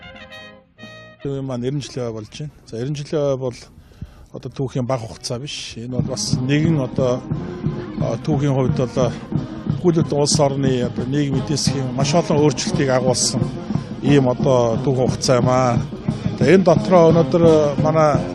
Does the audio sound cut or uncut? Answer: uncut